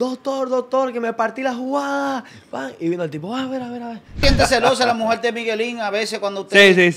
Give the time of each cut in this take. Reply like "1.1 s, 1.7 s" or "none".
4.2 s